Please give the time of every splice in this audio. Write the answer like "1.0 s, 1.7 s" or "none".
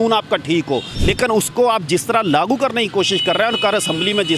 0.9 s